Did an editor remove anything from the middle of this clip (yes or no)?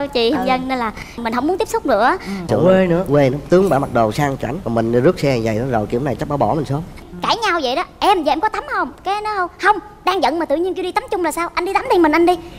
yes